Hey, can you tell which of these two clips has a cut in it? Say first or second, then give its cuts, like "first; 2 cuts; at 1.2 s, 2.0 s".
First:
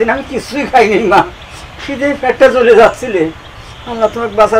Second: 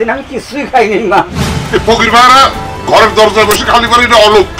second; 1 cut; at 1.5 s